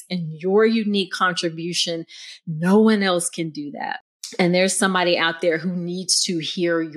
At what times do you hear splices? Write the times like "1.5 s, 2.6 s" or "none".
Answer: 4.4 s